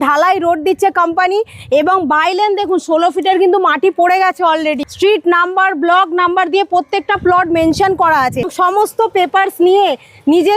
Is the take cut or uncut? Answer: cut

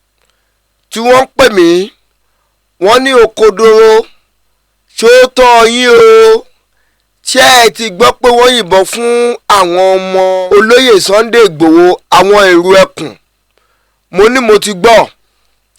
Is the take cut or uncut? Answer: cut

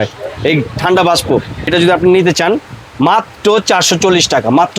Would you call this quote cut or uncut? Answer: cut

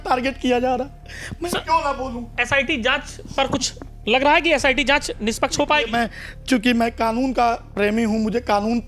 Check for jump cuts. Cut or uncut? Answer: uncut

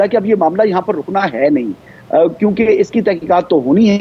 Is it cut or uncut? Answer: uncut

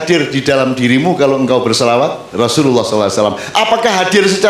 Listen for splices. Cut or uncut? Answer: cut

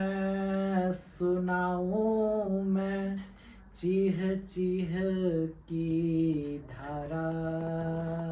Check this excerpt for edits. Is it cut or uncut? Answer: uncut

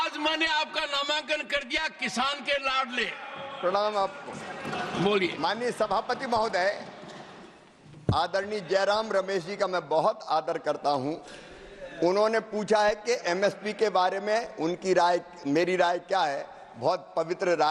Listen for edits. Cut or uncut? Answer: uncut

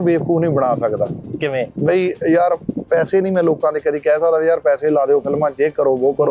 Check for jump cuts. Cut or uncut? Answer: uncut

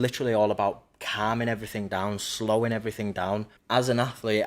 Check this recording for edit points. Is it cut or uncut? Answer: cut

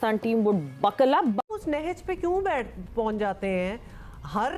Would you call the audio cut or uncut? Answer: cut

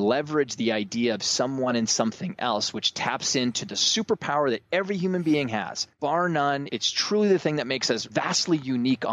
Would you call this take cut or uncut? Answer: cut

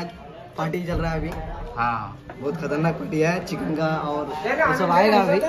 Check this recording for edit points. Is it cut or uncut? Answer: uncut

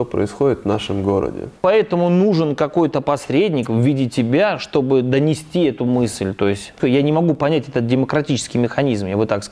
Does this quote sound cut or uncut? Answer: cut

